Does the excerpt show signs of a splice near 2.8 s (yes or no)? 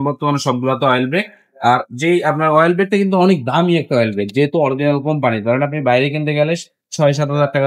no